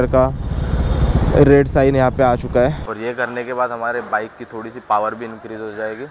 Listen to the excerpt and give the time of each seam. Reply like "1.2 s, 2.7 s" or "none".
2.9 s